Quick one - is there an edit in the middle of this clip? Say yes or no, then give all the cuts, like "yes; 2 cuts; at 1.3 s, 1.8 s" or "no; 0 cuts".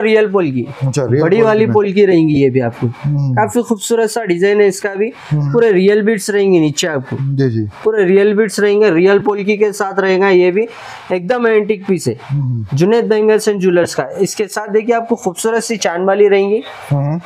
no; 0 cuts